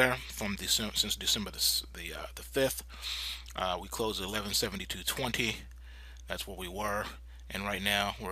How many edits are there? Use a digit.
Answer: 1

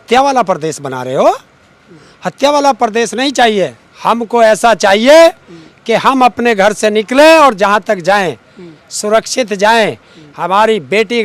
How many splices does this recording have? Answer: 0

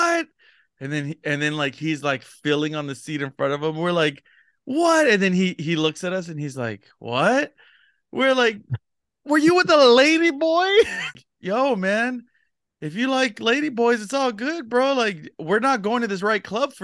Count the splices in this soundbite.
1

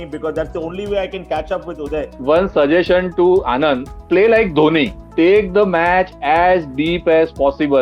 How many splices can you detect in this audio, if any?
3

